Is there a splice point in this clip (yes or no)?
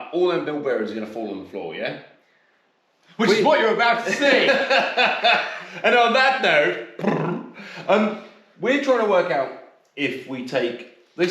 no